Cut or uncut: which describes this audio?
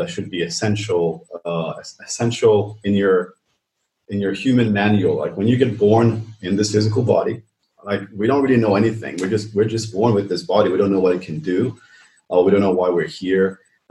cut